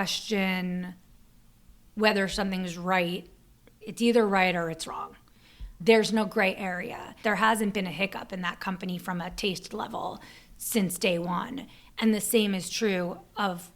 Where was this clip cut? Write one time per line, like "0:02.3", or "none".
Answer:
0:03.8
0:07.1